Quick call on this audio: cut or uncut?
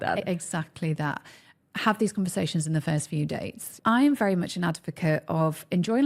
cut